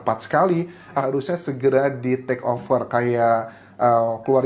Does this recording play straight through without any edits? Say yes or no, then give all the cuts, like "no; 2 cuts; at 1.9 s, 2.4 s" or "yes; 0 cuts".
no; 1 cut; at 1.0 s